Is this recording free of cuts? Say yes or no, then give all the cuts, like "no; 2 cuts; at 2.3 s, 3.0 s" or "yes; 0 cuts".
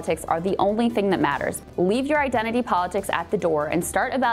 no; 1 cut; at 1.6 s